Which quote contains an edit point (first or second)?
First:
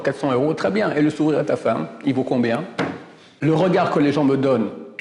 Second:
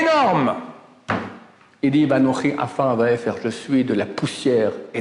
first